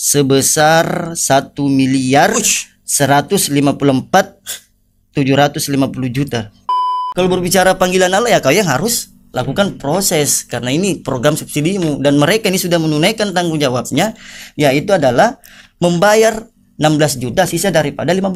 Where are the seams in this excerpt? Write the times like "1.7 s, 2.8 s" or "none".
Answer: 6.8 s